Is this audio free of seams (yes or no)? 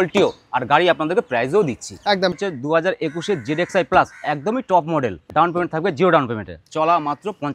no